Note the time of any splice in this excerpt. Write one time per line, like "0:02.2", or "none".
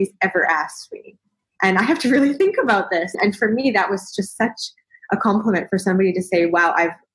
none